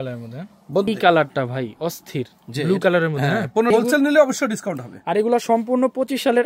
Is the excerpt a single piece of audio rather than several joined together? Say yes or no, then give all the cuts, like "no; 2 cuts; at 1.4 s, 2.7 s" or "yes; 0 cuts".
no; 2 cuts; at 0.9 s, 3.7 s